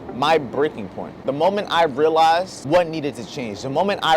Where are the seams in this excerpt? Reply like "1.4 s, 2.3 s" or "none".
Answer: 1.2 s, 2.6 s